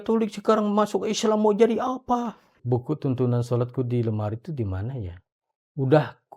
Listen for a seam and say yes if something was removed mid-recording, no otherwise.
yes